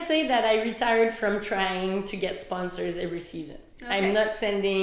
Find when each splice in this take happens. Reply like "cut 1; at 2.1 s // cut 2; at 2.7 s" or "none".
cut 1; at 3.6 s